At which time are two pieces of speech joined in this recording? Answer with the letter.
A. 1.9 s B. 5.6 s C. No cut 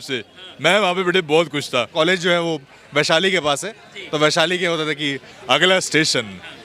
A